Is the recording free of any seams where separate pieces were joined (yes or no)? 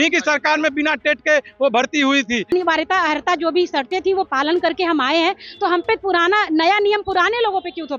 no